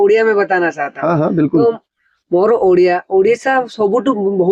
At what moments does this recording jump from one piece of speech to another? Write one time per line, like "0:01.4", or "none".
none